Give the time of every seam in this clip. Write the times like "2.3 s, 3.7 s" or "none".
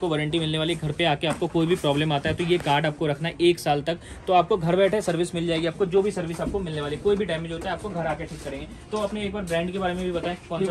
none